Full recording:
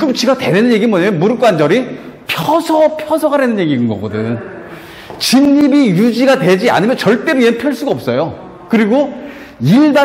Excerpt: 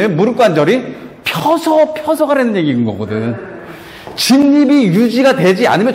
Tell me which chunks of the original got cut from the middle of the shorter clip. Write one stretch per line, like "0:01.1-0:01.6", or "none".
none

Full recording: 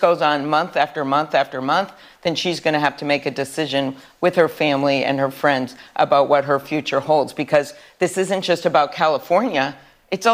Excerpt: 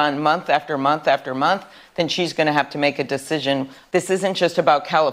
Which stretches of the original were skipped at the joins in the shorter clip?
0:04.0-0:07.8

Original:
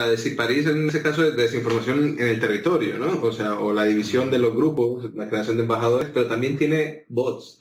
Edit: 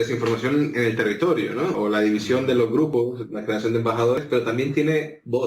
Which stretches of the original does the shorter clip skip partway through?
0:03.2-0:03.6

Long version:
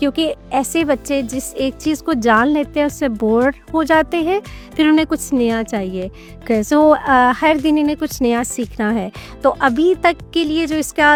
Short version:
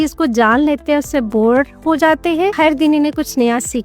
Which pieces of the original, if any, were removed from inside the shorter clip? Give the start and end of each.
0:04.4-0:07.4

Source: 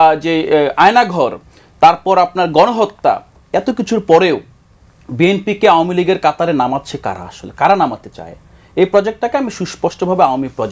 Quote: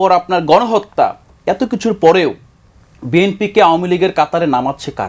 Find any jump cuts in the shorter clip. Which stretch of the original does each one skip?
none

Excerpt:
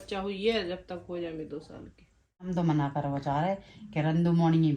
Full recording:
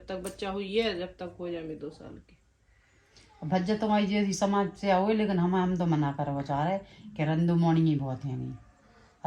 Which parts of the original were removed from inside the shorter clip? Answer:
0:02.8-0:05.7

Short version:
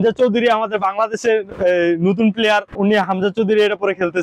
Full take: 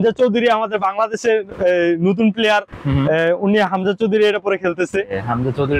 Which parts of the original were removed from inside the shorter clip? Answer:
0:02.8-0:03.4

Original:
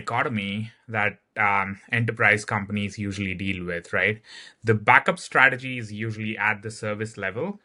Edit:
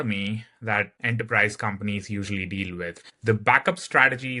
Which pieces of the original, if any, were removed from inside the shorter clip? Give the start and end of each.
0:01.2-0:01.9
0:03.8-0:04.4

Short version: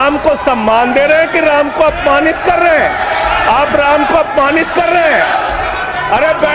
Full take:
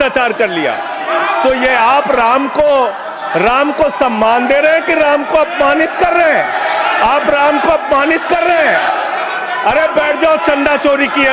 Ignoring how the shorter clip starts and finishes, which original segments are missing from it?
none

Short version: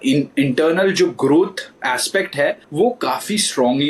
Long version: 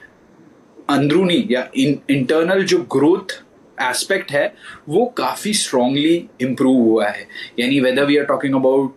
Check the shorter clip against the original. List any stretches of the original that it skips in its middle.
0:03.4-0:03.6
0:04.6-0:04.8

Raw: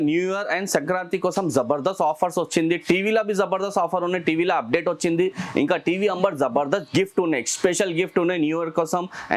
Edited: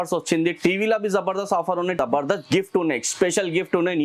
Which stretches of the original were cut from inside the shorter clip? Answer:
0:04.2-0:06.4

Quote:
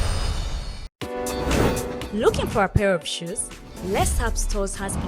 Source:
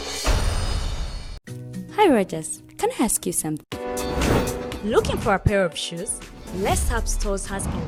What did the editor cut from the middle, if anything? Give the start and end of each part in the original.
0:01.4-0:03.7

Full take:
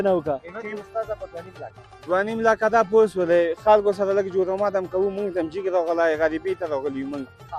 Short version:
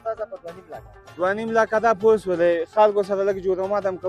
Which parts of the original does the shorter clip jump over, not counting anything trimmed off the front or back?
none

